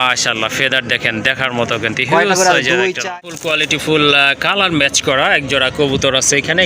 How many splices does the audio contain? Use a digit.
1